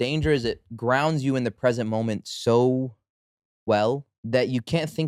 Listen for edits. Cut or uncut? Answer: cut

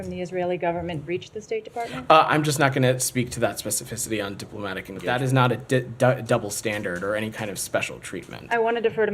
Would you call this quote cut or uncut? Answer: cut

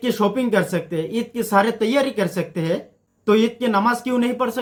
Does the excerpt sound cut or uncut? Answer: uncut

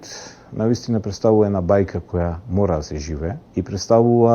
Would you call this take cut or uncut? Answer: cut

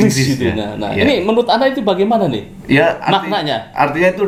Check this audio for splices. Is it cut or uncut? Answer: uncut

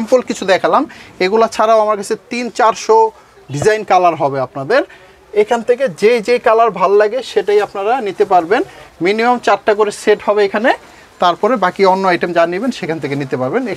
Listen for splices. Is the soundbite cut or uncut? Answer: uncut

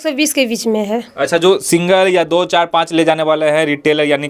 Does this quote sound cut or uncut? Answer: uncut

